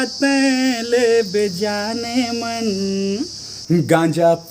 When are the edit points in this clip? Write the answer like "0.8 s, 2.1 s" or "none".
3.5 s